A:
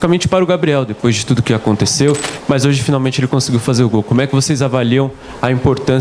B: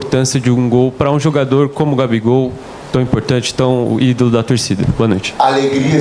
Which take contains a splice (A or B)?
A